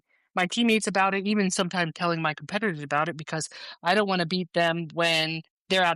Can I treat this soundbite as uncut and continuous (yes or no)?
yes